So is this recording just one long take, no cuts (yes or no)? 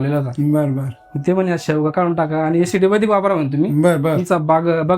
yes